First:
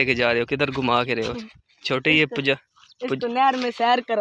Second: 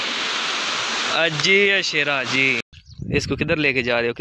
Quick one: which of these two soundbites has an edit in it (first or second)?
second